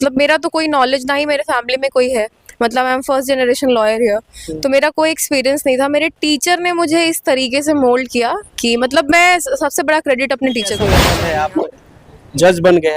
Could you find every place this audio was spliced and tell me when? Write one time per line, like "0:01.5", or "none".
0:11.0